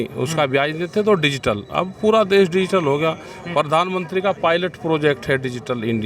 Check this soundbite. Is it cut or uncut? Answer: uncut